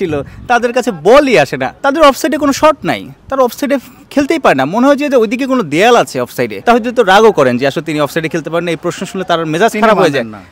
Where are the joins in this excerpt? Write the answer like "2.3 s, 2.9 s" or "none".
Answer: 1.7 s, 6.5 s